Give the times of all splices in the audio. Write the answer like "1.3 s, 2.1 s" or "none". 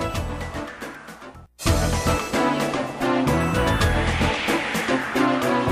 1.4 s, 2.9 s

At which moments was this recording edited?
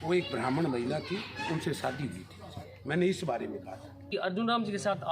4.1 s

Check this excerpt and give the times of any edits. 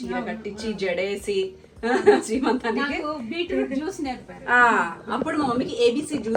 none

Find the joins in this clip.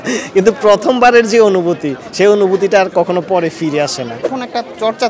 4.2 s

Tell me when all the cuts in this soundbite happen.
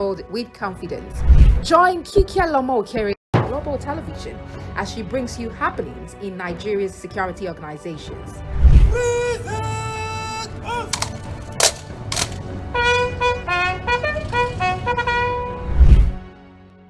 none

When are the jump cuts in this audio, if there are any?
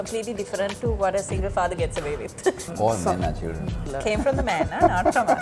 2.7 s, 3.9 s

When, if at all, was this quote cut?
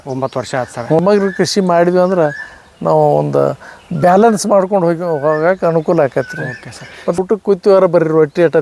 1.0 s, 7.2 s

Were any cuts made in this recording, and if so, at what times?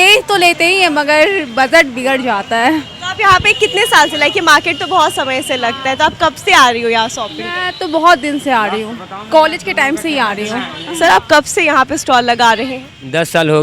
10.8 s

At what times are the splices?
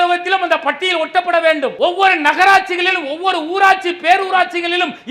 1.7 s

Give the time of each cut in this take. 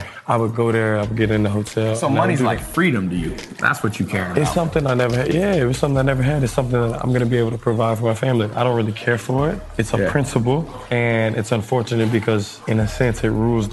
10.8 s, 12.6 s

